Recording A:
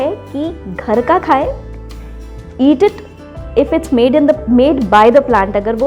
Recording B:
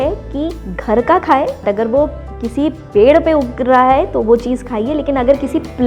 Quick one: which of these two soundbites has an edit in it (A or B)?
B